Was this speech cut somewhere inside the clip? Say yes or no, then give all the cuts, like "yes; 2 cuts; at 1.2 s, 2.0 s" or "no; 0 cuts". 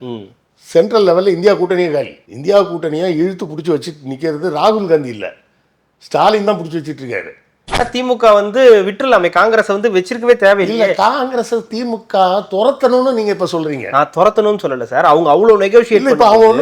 yes; 1 cut; at 7.9 s